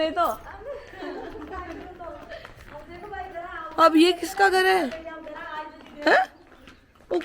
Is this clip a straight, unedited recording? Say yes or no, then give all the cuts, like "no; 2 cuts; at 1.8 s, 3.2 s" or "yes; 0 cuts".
yes; 0 cuts